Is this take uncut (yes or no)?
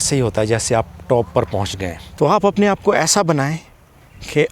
no